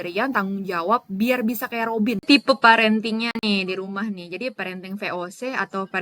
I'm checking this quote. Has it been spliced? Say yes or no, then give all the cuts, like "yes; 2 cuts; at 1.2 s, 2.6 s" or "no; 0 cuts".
yes; 1 cut; at 2.2 s